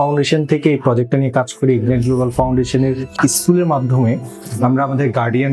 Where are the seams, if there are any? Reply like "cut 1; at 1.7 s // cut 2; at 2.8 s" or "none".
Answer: cut 1; at 3.2 s